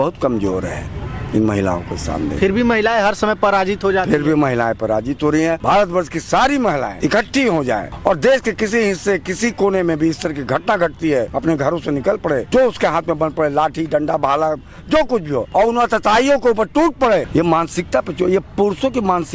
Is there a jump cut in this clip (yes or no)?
yes